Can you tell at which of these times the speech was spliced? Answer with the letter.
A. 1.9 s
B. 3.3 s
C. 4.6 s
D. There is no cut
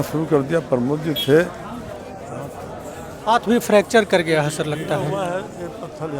A